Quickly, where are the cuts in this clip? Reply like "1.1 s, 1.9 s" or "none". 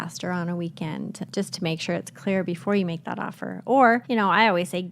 1.3 s, 4.0 s